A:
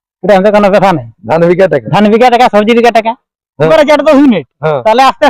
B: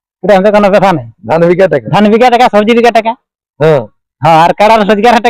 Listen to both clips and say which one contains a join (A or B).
A